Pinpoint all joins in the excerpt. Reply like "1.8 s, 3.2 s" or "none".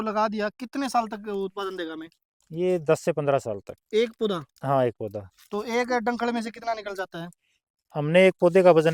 none

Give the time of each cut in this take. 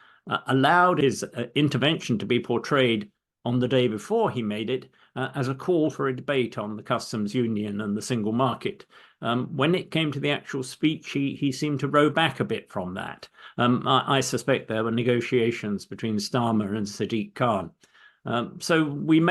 1.0 s

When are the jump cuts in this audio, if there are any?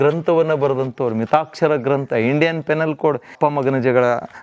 3.3 s

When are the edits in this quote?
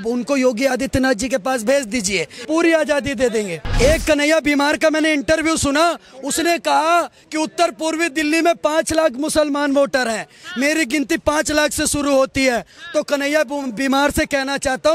2.3 s, 3.6 s

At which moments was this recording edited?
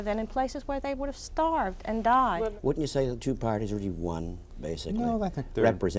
2.5 s

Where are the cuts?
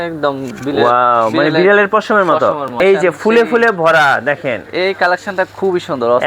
2.8 s

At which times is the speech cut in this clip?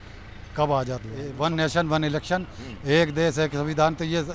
1.2 s

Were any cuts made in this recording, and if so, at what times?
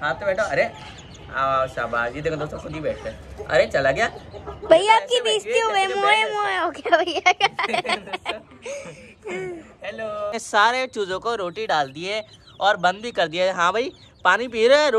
10.4 s

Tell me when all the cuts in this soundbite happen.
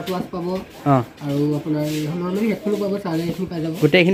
none

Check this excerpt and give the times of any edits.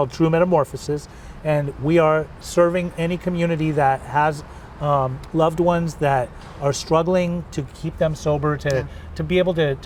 none

